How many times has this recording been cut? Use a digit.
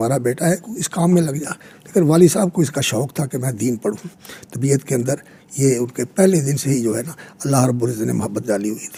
0